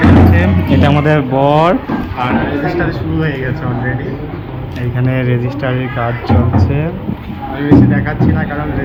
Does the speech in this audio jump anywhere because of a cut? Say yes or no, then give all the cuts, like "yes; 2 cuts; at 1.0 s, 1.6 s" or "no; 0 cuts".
no; 0 cuts